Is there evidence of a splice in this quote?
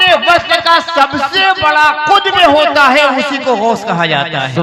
no; 0 cuts

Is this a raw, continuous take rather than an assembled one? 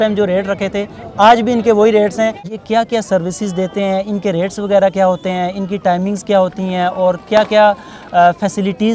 no; 1 cut; at 2.5 s

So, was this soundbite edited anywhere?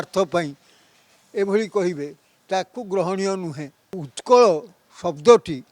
yes; 1 cut; at 4.1 s

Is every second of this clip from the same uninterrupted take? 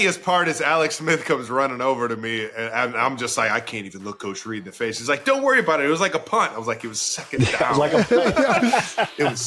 yes; 0 cuts

